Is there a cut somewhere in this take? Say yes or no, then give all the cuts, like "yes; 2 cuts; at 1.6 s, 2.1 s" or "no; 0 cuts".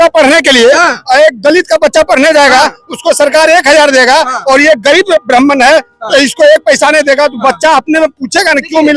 no; 0 cuts